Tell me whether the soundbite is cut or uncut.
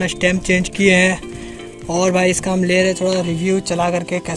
uncut